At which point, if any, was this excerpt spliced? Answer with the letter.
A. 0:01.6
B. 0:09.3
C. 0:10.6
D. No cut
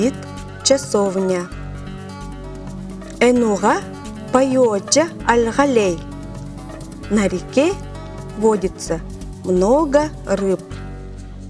C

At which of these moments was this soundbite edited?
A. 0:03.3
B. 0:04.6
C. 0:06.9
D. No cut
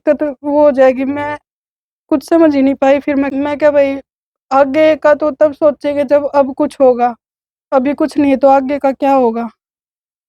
A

